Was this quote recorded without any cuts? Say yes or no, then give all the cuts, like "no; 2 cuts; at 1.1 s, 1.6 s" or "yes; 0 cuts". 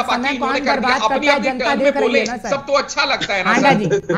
yes; 0 cuts